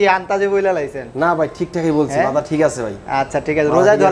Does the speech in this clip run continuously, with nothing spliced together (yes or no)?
yes